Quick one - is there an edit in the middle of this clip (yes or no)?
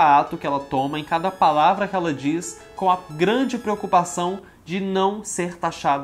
no